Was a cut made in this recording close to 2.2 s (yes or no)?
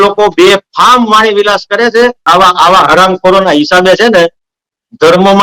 yes